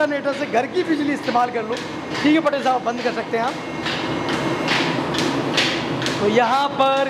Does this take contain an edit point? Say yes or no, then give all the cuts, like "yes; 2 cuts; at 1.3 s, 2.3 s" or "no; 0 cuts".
no; 0 cuts